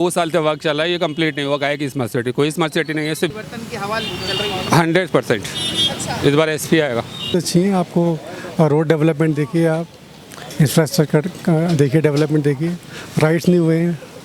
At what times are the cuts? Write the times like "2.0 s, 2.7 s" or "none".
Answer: 3.3 s, 7.3 s